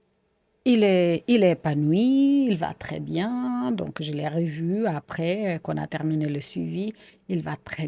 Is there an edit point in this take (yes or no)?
no